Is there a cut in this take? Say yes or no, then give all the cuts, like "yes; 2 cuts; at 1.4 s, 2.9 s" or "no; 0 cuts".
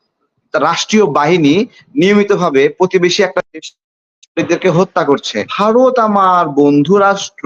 yes; 1 cut; at 5.4 s